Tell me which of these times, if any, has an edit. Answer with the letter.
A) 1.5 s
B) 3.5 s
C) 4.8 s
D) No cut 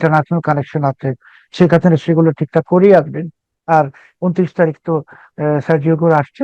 A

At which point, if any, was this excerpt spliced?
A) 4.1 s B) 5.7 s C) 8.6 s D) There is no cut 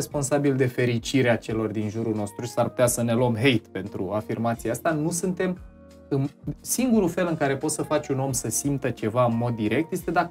D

